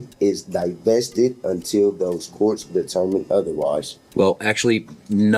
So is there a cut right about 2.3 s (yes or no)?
no